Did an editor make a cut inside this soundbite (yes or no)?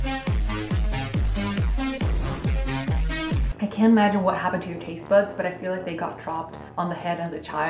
yes